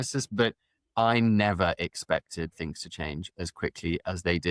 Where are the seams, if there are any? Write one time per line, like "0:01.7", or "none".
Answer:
none

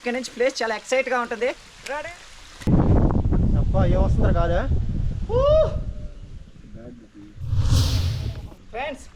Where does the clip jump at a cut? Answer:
0:02.7

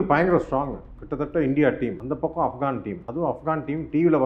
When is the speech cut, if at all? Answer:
none

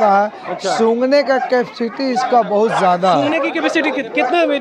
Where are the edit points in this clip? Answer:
none

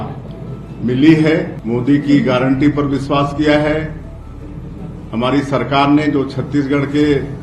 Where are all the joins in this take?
0:01.6

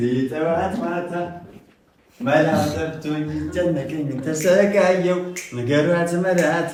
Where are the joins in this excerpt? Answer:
none

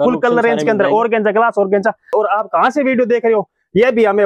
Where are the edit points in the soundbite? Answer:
0:02.1

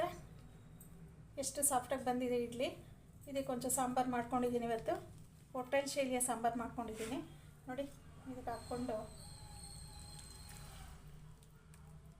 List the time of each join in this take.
0:07.1

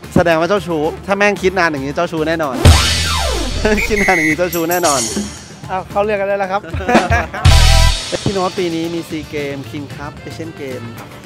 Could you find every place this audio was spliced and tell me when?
0:08.0

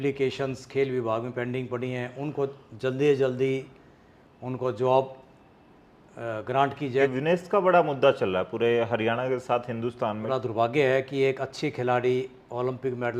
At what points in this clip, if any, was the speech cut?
0:07.1
0:10.2

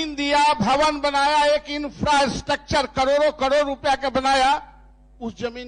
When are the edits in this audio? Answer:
none

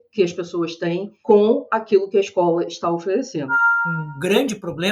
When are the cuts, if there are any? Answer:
0:01.1
0:03.6

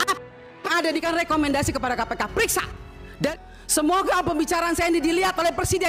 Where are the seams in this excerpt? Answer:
0:01.0
0:03.3

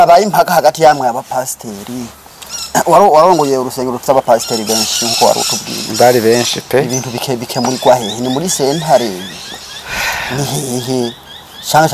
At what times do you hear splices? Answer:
none

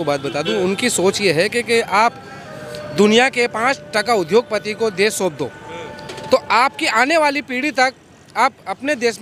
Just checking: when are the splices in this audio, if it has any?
none

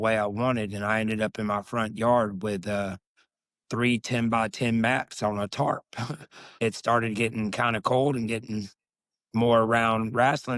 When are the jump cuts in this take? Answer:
0:06.4

